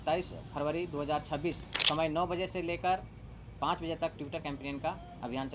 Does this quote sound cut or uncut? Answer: cut